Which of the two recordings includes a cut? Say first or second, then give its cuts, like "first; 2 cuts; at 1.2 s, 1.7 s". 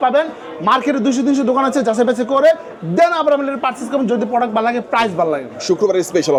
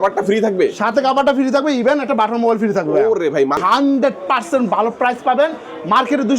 second; 1 cut; at 3.6 s